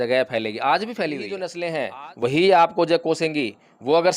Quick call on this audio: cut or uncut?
cut